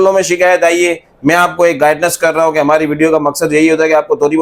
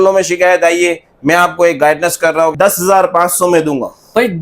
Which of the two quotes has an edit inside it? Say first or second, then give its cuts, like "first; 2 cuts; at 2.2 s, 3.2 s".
second; 1 cut; at 2.5 s